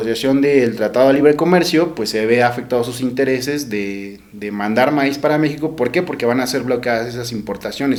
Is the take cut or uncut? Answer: uncut